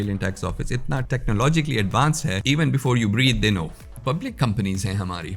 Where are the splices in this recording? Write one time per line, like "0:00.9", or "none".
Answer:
0:01.0
0:02.4
0:03.9